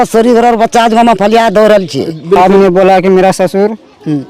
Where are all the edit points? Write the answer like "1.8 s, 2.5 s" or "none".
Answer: 2.4 s